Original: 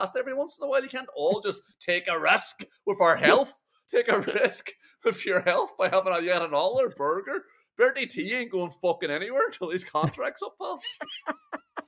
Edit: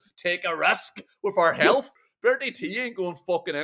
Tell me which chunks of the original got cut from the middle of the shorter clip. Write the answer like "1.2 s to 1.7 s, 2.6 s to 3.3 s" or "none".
3.7 s to 7.6 s